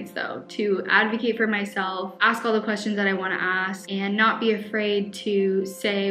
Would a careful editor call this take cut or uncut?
uncut